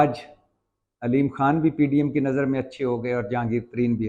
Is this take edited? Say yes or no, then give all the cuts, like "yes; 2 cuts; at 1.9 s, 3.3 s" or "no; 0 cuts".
no; 0 cuts